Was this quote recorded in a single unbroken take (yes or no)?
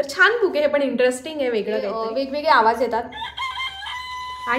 no